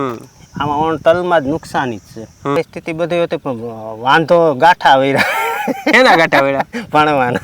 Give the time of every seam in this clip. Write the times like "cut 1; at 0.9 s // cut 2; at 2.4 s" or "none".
cut 1; at 2.6 s